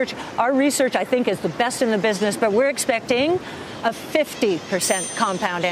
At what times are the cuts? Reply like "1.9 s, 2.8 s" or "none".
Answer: none